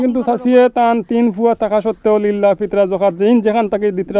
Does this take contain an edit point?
no; 0 cuts

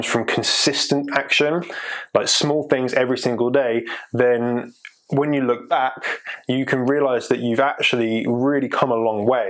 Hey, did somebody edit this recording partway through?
no; 0 cuts

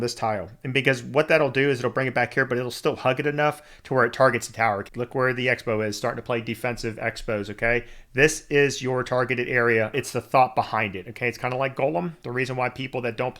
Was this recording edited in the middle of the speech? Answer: yes; 2 cuts; at 4.8 s, 10.0 s

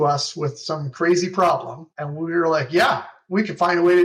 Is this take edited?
no; 0 cuts

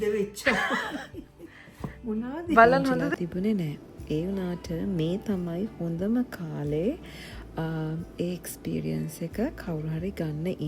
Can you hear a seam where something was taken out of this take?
yes; 1 cut; at 3.1 s

